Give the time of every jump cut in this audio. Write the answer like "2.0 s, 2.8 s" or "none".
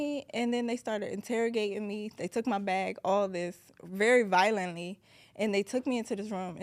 none